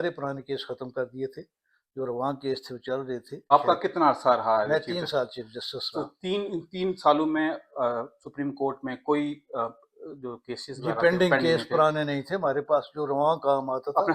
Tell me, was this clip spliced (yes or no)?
no